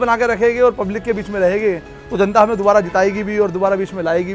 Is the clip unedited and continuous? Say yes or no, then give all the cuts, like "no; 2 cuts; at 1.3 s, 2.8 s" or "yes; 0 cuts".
yes; 0 cuts